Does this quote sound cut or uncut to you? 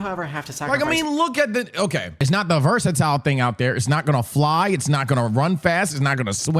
cut